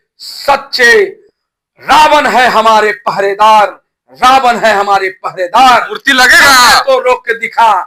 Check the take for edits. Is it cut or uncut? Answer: uncut